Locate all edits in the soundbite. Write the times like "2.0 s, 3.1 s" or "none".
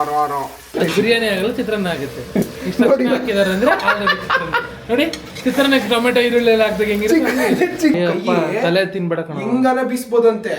0.7 s, 8.0 s